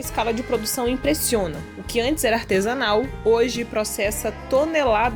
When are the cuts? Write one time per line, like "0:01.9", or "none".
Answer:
none